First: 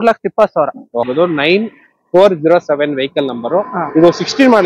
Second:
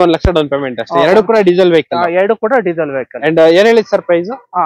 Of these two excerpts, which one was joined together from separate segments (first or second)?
first